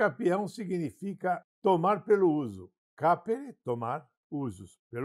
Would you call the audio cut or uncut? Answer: cut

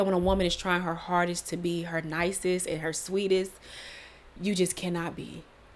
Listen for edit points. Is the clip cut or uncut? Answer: uncut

